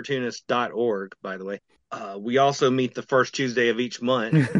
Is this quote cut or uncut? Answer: cut